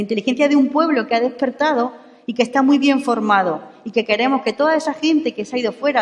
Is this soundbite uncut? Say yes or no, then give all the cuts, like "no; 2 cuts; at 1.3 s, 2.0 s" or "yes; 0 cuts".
yes; 0 cuts